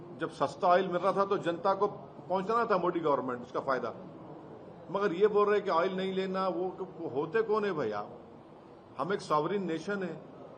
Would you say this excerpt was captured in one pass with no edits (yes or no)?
yes